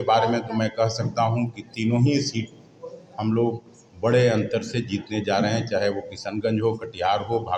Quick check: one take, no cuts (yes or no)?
yes